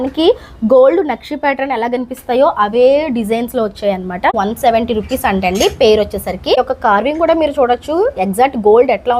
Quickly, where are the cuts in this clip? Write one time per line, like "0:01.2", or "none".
0:04.3
0:06.5